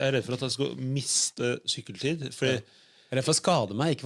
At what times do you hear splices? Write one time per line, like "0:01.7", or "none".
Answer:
none